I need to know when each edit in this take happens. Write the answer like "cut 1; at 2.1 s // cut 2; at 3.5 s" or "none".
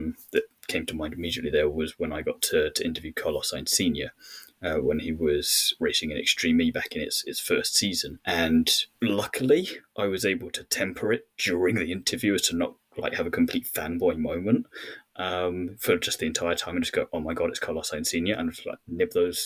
cut 1; at 5.7 s // cut 2; at 8.1 s // cut 3; at 8.8 s